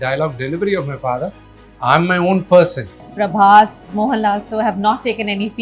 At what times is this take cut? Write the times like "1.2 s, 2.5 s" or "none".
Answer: 3.0 s, 3.9 s